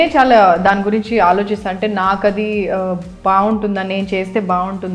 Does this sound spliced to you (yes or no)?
no